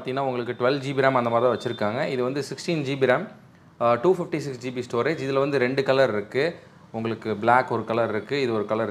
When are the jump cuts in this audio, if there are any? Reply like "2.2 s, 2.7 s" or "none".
none